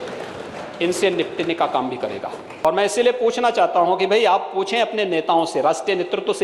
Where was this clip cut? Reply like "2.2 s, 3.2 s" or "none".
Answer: 2.5 s